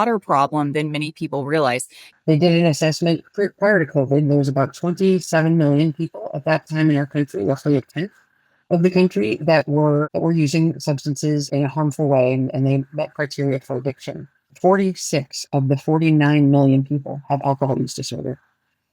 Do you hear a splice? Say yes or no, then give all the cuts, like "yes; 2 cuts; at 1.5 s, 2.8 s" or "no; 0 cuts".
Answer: yes; 3 cuts; at 2.0 s, 11.5 s, 14.5 s